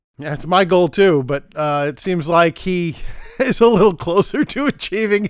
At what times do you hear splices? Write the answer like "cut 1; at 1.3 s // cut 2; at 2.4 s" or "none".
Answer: none